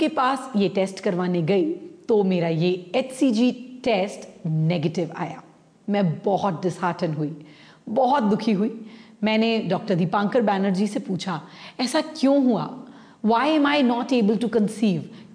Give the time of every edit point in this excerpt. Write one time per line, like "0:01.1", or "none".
none

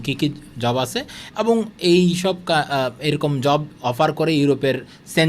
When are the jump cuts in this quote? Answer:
none

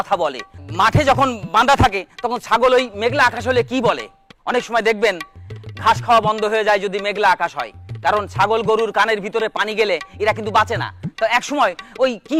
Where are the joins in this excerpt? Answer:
none

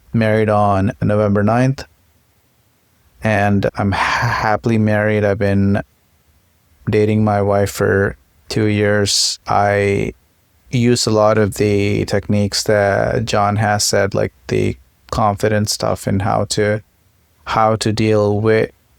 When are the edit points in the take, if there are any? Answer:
0:01.0
0:03.7
0:09.3

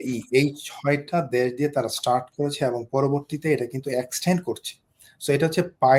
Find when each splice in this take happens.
none

